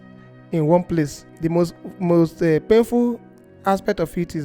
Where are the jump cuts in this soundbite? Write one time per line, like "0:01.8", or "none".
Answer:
0:01.3

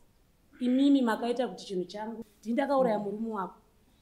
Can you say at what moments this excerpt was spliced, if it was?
0:02.3

